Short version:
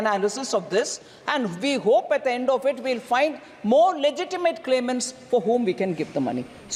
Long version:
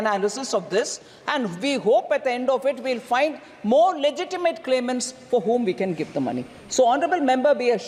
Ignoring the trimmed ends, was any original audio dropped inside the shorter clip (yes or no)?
no